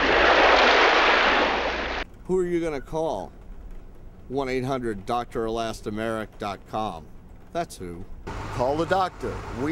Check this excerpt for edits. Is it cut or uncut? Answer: uncut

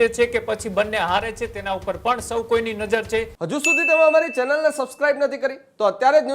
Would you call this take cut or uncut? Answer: cut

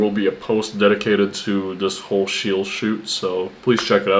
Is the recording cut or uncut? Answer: uncut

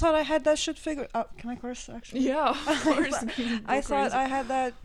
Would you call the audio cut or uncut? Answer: uncut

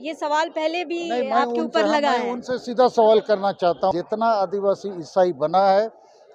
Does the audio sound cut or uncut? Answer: cut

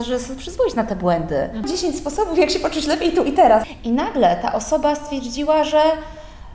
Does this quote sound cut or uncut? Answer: cut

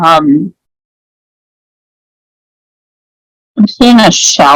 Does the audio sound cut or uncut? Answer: uncut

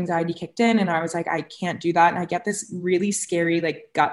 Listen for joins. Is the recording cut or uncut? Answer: uncut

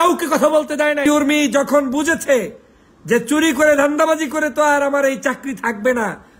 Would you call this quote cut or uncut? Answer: cut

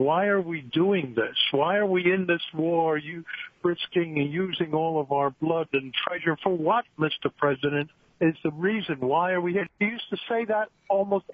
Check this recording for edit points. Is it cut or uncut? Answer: cut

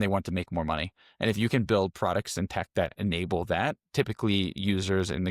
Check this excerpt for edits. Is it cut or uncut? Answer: uncut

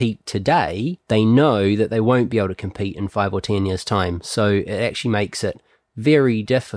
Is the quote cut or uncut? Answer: cut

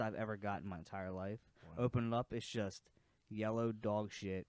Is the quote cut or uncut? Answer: uncut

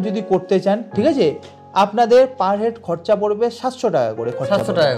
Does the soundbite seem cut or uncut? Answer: uncut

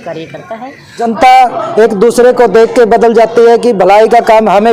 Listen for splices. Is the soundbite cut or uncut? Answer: cut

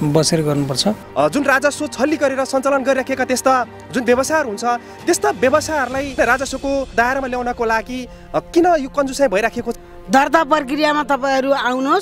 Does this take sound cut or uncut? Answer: cut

